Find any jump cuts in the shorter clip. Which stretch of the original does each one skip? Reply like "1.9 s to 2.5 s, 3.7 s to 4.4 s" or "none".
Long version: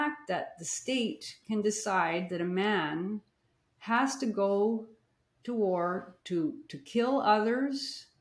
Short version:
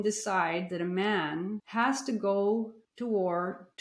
3.2 s to 3.8 s, 5.0 s to 5.3 s

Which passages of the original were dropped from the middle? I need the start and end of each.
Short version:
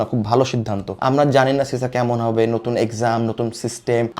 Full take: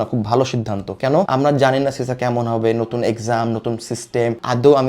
1.0 s to 1.3 s

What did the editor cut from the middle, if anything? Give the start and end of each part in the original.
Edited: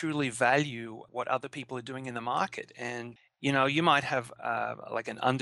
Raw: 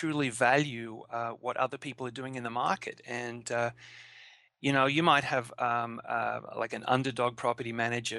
1.1 s to 1.4 s, 3.4 s to 4.3 s, 5.5 s to 6.0 s

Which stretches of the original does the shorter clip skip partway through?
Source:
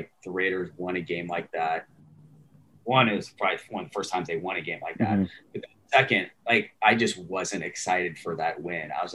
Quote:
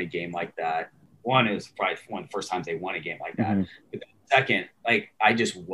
2.0 s to 2.6 s

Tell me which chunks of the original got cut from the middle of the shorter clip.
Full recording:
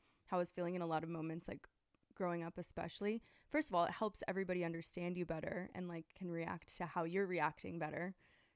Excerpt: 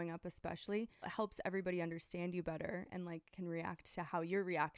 3.4 s to 3.9 s

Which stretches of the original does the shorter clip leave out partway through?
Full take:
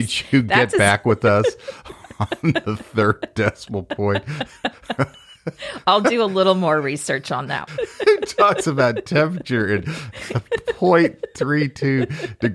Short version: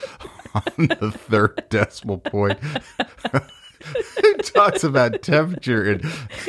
5.4 s to 7.6 s

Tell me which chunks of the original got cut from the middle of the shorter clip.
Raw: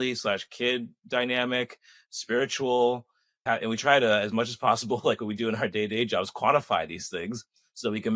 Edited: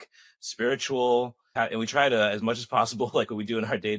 3.1 s to 3.3 s

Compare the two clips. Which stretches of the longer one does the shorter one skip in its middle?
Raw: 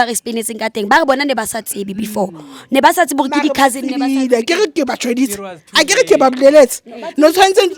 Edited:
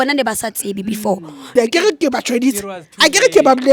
2.6 s to 4.3 s

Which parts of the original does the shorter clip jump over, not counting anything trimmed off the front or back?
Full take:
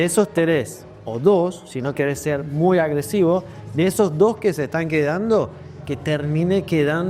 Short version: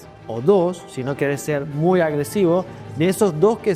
none

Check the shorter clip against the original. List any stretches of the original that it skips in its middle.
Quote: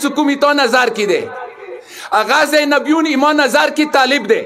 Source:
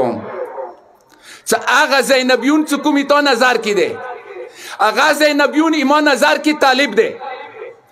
none

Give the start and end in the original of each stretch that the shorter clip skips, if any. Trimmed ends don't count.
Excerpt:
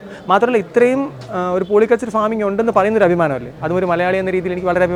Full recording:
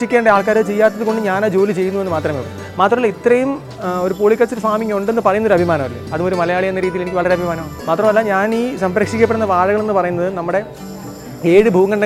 none

